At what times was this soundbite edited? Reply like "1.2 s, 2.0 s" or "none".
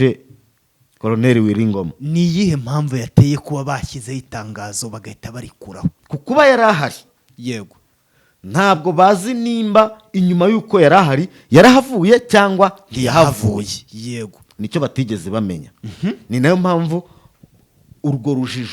6.0 s